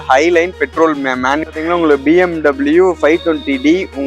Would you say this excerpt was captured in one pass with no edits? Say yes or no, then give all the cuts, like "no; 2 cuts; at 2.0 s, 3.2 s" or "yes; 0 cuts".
no; 1 cut; at 1.4 s